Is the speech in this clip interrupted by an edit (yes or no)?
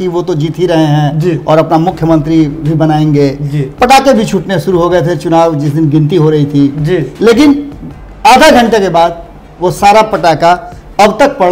no